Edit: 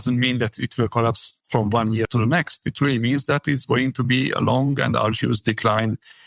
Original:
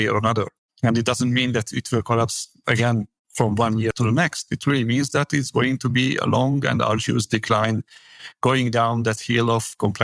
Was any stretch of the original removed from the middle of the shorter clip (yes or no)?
yes